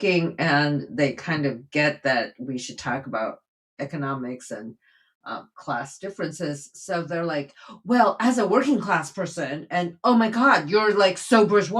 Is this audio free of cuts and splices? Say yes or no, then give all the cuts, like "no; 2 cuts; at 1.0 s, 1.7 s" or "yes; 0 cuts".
yes; 0 cuts